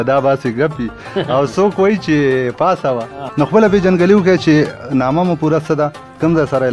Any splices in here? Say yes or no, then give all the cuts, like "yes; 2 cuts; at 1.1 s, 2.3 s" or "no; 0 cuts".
yes; 1 cut; at 3.2 s